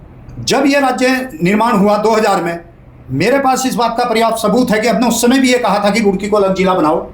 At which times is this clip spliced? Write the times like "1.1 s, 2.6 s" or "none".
none